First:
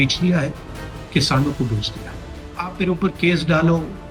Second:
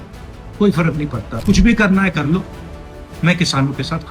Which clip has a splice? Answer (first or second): second